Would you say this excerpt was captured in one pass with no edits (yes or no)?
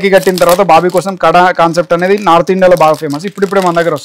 yes